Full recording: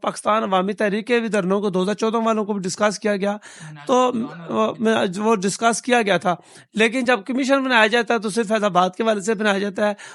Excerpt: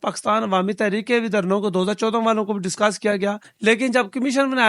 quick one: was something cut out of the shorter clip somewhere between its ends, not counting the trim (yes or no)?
yes